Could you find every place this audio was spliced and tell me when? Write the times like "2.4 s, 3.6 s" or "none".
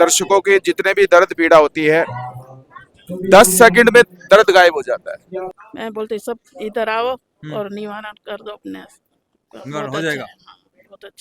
5.6 s